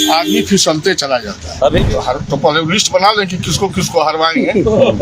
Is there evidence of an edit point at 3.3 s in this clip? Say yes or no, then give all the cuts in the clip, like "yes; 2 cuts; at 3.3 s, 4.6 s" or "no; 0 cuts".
no; 1 cut; at 1.8 s